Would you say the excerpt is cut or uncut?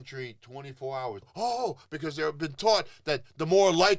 cut